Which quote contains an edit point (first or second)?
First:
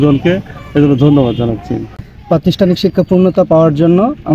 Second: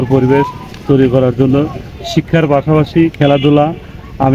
first